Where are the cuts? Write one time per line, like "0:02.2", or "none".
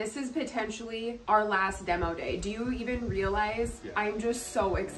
0:01.2
0:03.8